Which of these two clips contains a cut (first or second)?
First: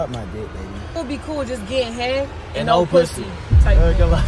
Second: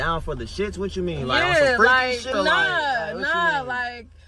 first